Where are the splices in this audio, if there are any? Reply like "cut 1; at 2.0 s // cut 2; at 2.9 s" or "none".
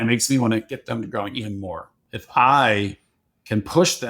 cut 1; at 2.0 s

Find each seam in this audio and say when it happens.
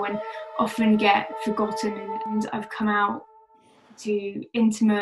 cut 1; at 2.3 s

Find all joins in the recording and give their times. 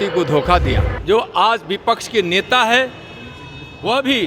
cut 1; at 0.9 s

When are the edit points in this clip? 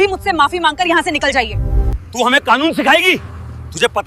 cut 1; at 1.9 s

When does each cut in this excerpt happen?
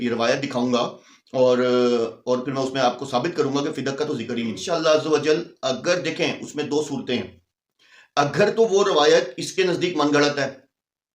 cut 1; at 4.6 s

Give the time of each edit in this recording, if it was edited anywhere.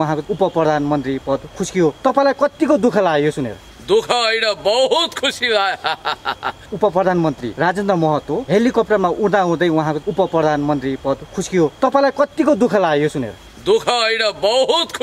cut 1; at 2.0 s // cut 2; at 6.7 s // cut 3; at 11.8 s

